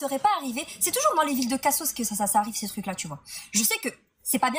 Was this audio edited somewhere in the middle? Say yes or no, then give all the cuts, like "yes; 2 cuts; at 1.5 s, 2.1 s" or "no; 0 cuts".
yes; 1 cut; at 2.9 s